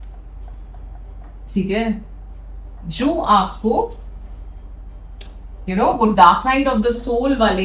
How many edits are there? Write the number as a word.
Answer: zero